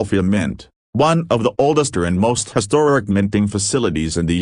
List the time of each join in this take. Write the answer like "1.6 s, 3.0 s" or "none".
none